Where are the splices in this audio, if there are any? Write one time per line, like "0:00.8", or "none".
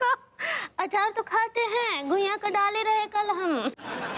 none

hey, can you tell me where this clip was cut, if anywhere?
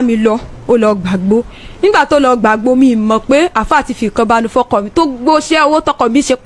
none

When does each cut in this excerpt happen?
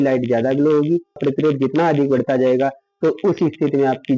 0:01.2

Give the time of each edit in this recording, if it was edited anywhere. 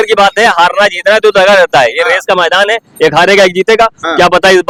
none

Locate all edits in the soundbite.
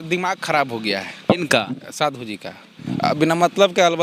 none

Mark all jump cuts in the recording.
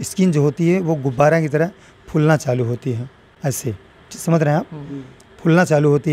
none

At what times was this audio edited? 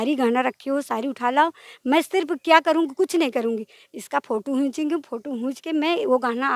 none

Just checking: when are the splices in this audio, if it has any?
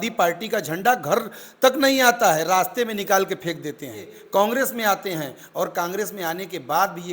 0:04.2

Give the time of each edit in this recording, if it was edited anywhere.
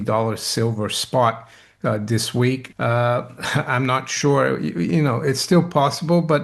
0:02.7

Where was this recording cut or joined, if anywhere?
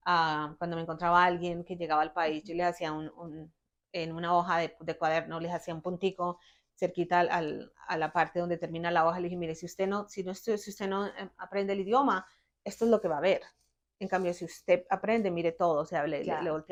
none

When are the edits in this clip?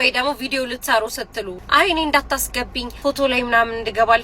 0:01.5
0:02.8

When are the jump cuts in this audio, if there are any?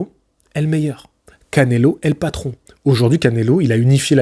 none

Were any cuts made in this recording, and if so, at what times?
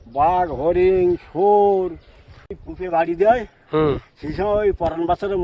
0:02.5

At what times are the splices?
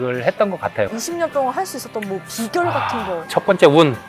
0:00.9
0:03.3

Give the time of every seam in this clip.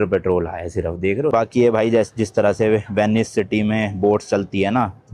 0:01.3

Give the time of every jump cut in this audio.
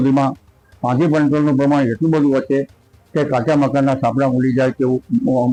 none

